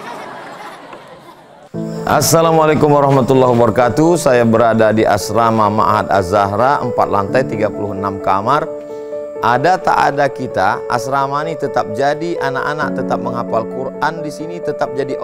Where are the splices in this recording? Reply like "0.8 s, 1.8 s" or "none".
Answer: 1.7 s